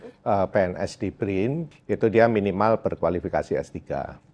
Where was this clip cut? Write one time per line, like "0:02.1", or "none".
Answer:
0:01.7